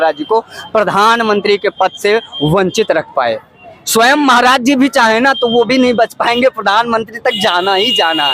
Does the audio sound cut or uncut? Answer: uncut